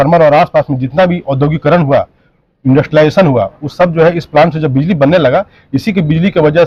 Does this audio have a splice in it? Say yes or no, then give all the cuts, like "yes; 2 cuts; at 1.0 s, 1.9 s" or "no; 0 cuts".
no; 0 cuts